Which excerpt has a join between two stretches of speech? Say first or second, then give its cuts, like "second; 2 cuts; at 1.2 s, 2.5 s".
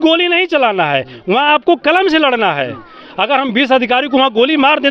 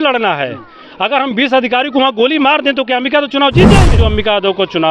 second; 1 cut; at 4.0 s